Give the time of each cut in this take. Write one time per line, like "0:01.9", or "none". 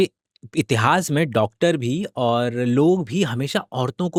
none